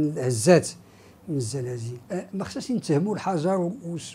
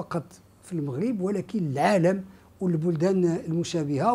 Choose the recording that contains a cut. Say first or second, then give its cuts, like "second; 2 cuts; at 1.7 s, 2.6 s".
first; 1 cut; at 1.9 s